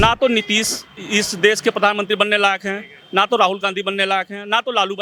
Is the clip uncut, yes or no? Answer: yes